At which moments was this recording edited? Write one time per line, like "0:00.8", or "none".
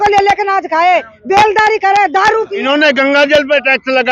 0:02.5